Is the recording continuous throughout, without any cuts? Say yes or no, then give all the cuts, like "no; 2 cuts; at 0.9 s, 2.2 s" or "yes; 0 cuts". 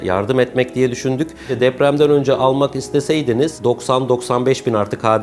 no; 2 cuts; at 1.4 s, 3.6 s